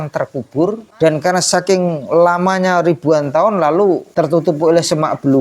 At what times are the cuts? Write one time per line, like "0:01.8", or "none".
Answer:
0:00.9
0:04.1